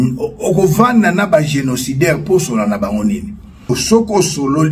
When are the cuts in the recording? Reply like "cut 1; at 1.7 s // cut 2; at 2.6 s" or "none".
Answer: none